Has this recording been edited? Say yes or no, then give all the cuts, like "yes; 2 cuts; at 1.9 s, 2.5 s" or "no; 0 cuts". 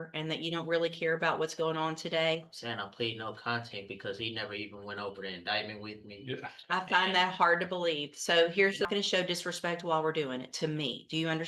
yes; 1 cut; at 8.9 s